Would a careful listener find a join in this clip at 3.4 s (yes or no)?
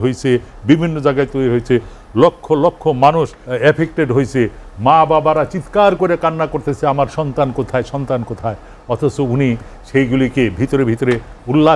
yes